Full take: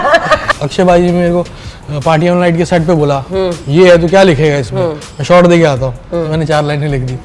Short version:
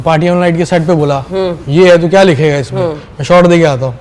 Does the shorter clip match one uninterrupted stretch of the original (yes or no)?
yes